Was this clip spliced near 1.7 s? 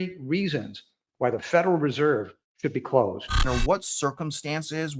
no; 1 cut; at 3.4 s

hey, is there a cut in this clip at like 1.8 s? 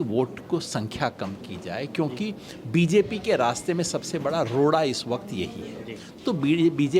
no; 0 cuts

